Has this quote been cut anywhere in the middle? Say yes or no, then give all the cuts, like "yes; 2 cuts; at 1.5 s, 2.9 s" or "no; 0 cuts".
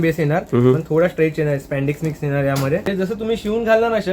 yes; 1 cut; at 2.9 s